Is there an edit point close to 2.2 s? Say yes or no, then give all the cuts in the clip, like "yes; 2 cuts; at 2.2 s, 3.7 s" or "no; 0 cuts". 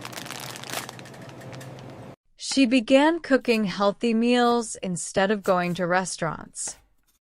yes; 1 cut; at 2.2 s